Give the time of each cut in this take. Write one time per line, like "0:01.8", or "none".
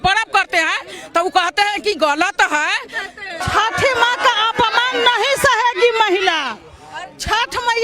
0:03.3